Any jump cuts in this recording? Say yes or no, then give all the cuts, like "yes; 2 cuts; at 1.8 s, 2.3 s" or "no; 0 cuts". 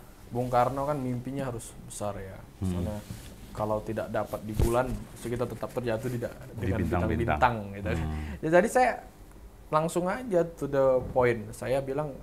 no; 0 cuts